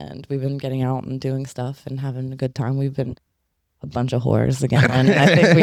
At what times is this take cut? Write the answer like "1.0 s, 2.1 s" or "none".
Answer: none